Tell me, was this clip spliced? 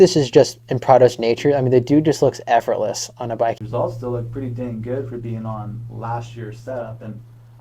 yes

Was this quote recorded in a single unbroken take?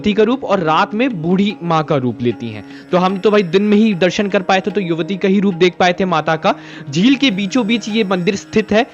yes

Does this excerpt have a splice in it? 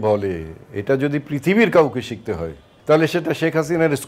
yes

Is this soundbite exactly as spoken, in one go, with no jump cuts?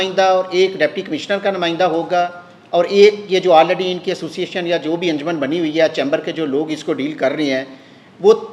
yes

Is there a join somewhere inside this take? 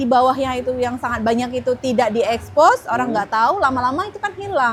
no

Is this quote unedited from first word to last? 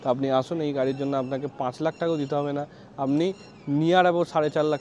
yes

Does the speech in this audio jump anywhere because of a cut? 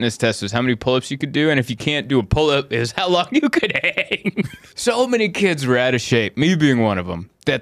yes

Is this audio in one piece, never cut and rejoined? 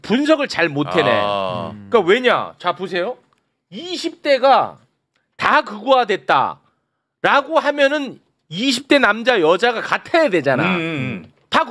yes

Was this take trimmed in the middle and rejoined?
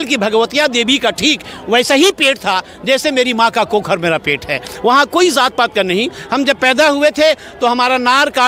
no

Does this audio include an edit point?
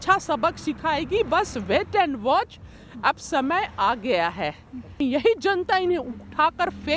yes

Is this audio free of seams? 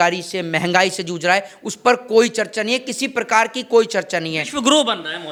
yes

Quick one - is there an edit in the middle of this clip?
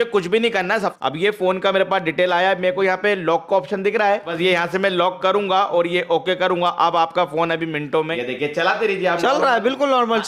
yes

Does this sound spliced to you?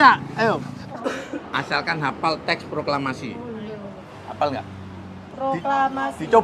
yes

